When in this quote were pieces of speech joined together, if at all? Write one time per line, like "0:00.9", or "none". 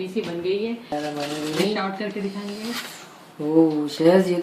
0:00.9